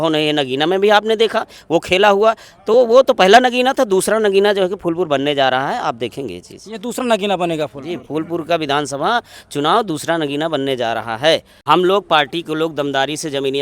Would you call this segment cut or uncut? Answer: uncut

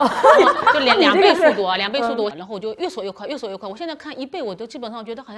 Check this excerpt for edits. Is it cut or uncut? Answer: cut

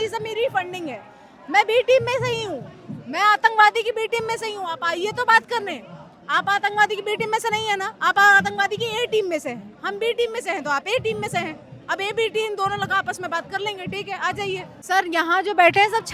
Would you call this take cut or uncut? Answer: cut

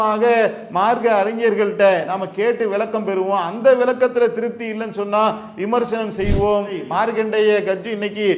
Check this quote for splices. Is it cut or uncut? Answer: cut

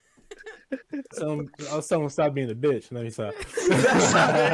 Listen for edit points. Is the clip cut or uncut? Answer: uncut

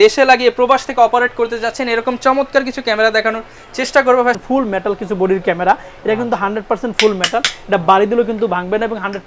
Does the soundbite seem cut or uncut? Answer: cut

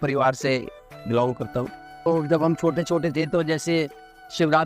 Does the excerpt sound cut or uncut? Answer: cut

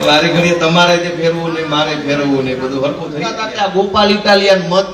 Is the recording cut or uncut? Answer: cut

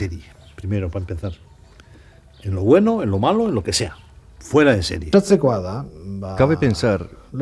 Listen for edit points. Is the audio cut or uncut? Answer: cut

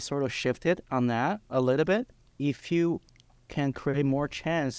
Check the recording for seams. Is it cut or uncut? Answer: cut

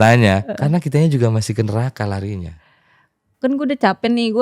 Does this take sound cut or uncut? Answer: uncut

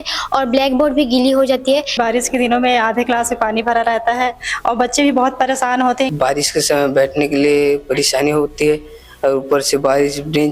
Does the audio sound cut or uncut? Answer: cut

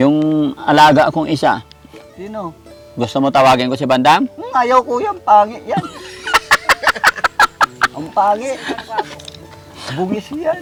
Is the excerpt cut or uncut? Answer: uncut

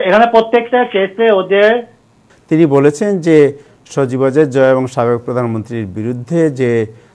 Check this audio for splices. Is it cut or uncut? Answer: cut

